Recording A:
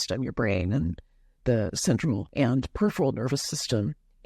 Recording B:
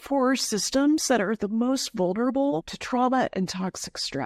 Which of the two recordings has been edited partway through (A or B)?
A